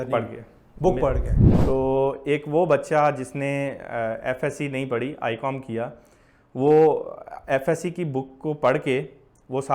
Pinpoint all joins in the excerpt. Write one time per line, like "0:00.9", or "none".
0:01.3